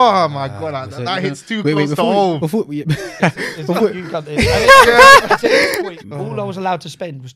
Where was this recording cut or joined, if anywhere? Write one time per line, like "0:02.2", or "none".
0:05.8